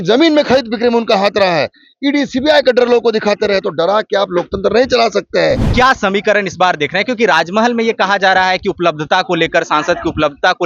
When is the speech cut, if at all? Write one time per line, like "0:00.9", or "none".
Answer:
0:05.7